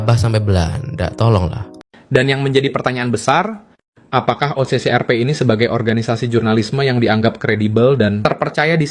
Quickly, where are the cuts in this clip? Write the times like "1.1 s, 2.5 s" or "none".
1.6 s